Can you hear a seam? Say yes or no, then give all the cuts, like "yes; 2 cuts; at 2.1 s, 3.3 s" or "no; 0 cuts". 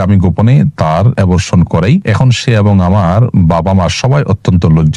yes; 2 cuts; at 1.1 s, 2.1 s